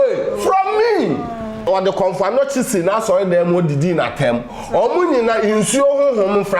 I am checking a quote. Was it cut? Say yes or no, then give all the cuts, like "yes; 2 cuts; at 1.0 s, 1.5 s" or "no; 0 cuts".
yes; 1 cut; at 1.7 s